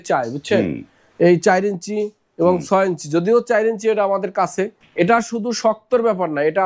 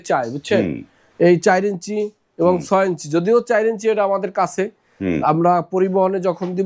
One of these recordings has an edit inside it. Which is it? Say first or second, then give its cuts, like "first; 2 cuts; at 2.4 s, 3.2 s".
first; 1 cut; at 4.8 s